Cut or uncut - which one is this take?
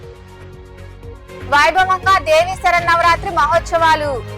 uncut